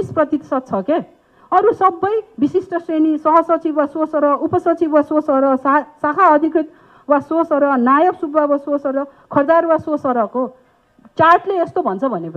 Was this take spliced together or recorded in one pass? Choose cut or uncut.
uncut